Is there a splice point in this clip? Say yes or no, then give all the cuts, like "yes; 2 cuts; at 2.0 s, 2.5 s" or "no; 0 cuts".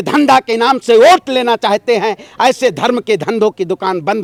no; 0 cuts